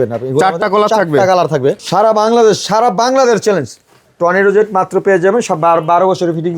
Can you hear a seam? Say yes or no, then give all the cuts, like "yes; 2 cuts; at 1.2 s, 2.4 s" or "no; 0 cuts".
yes; 1 cut; at 1.8 s